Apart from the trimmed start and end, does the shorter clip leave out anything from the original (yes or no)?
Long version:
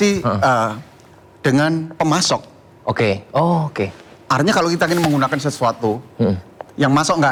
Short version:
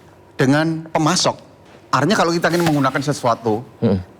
yes